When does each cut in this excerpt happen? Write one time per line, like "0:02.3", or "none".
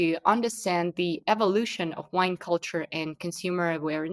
none